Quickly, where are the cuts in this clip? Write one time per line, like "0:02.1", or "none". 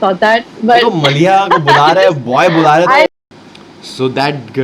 0:03.1

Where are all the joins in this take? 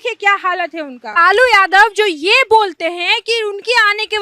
0:01.2

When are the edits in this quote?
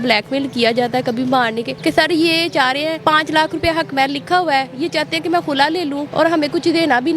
0:01.7
0:03.0
0:06.1

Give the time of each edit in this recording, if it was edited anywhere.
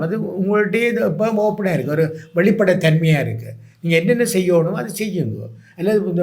none

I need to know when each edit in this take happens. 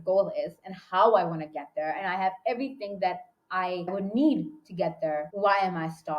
0:03.9
0:05.3

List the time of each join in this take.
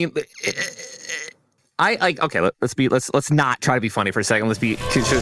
0:01.6

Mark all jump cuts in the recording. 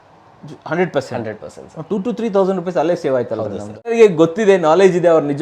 0:03.9

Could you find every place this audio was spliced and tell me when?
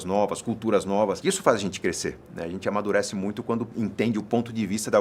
0:01.2
0:03.7

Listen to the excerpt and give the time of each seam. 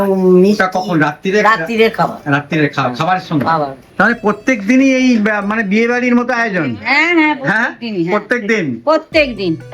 0:03.8

